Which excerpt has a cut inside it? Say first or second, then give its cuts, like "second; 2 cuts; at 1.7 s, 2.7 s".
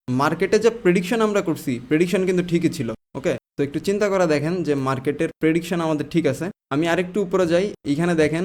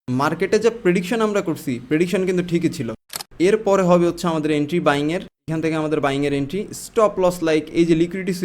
second; 1 cut; at 3.2 s